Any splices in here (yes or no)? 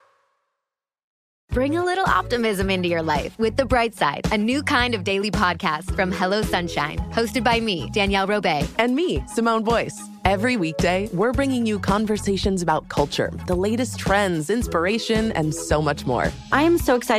no